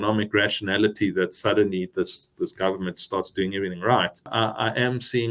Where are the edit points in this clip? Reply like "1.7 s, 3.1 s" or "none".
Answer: 4.3 s